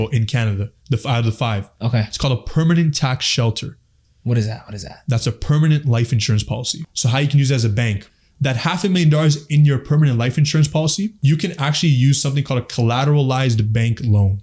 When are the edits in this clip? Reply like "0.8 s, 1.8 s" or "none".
6.9 s, 8.1 s, 11.2 s